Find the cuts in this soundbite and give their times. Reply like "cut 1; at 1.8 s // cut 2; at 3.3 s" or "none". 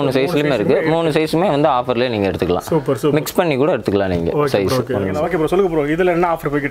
cut 1; at 5.1 s